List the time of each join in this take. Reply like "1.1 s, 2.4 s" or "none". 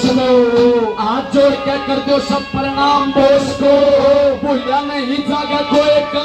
none